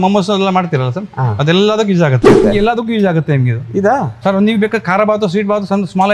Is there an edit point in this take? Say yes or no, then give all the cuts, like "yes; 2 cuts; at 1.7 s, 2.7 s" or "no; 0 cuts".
yes; 1 cut; at 2.4 s